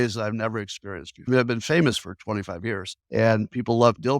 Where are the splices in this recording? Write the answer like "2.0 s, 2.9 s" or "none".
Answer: 1.3 s, 2.9 s